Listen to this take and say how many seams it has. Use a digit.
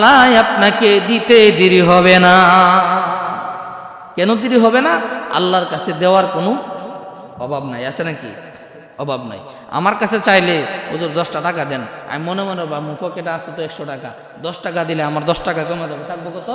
0